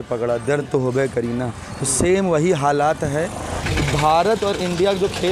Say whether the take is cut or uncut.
cut